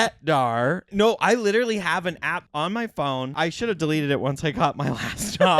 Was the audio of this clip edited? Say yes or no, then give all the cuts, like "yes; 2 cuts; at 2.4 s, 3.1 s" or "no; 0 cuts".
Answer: yes; 3 cuts; at 0.8 s, 2.4 s, 3.3 s